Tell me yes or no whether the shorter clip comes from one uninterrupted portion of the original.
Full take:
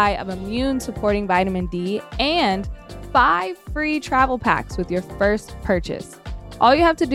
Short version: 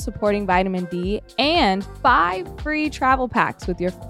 no